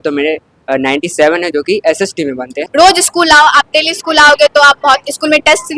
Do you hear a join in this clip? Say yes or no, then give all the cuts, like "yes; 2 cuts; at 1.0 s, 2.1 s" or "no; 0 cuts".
yes; 1 cut; at 2.6 s